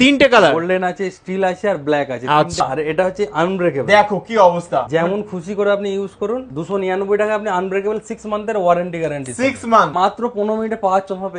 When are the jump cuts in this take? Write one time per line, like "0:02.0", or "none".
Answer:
0:02.6
0:06.5
0:09.9